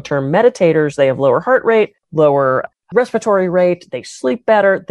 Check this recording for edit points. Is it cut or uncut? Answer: cut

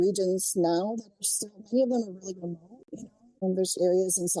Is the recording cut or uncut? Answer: uncut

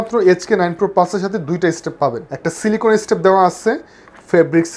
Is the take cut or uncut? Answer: cut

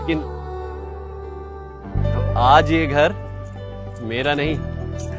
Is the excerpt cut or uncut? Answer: uncut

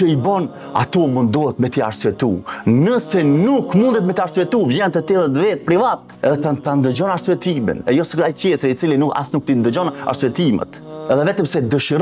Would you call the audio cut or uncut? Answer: uncut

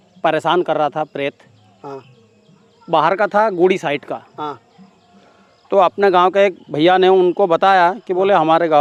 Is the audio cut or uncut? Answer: uncut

